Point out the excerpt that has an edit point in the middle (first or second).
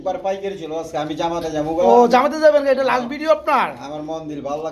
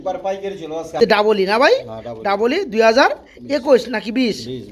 second